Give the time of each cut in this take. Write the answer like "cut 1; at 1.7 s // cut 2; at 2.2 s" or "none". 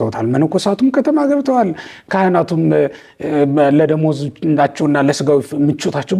none